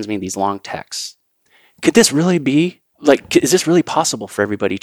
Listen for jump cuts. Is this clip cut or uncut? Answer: cut